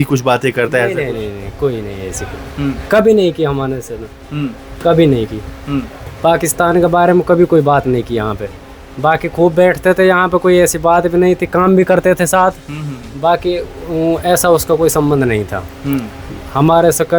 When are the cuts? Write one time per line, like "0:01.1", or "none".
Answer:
none